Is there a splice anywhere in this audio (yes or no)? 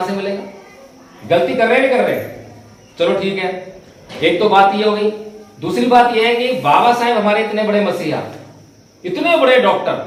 no